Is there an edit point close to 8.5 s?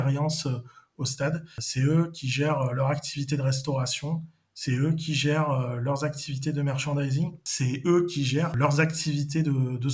yes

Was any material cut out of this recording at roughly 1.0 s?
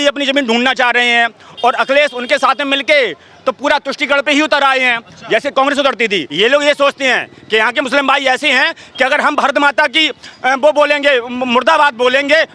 no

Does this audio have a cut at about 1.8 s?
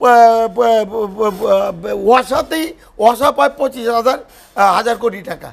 no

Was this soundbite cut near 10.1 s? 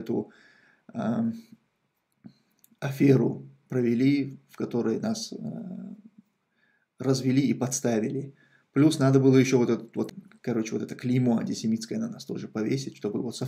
yes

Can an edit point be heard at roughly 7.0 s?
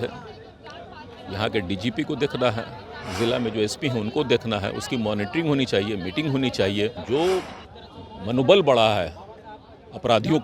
yes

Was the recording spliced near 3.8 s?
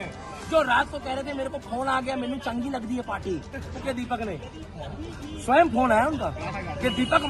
yes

